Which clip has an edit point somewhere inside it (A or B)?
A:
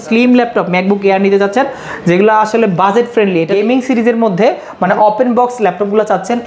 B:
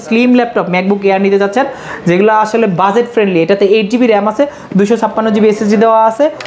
A